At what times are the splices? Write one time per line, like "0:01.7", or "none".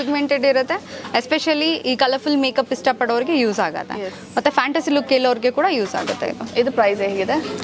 none